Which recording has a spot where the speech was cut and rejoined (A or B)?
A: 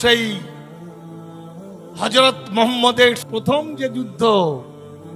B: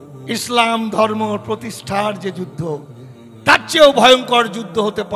A